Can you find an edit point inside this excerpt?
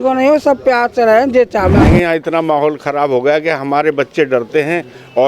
yes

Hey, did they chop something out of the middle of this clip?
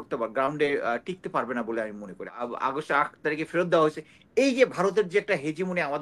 yes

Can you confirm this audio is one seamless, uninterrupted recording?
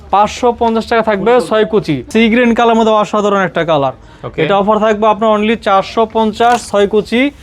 no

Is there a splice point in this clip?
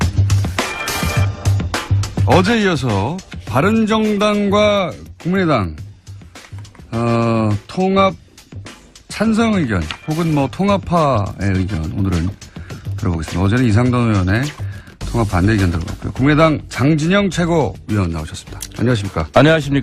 no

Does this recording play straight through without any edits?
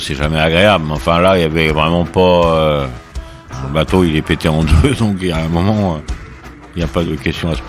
no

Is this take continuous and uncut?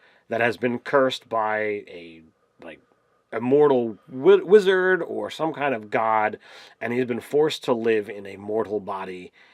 yes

